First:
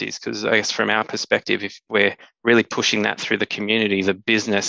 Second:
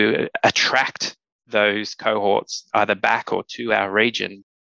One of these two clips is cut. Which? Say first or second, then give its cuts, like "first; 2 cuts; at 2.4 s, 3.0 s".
first; 1 cut; at 1.7 s